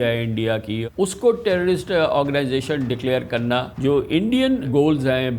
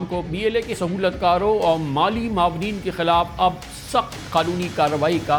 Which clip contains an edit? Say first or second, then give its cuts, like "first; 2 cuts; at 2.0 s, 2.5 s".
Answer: first; 3 cuts; at 0.8 s, 3.7 s, 4.7 s